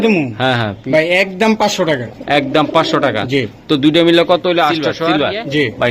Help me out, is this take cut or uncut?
cut